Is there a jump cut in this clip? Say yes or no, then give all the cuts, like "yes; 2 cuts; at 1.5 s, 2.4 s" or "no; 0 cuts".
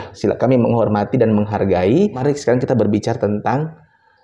yes; 1 cut; at 2.2 s